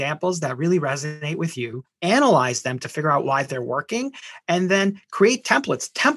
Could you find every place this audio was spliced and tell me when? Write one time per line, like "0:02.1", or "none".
0:01.8